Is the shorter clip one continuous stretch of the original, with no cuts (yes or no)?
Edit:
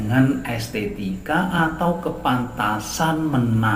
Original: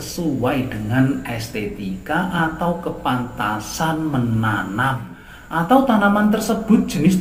yes